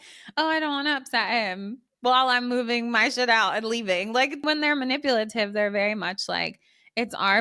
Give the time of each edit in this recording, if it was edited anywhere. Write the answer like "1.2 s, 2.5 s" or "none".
4.4 s